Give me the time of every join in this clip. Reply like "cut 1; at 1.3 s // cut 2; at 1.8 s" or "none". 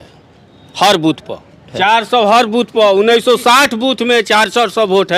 none